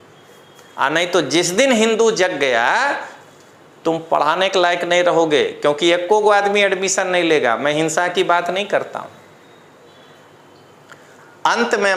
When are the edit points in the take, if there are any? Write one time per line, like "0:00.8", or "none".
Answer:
none